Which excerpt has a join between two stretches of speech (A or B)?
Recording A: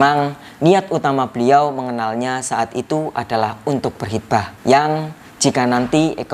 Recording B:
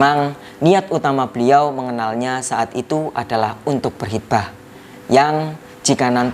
A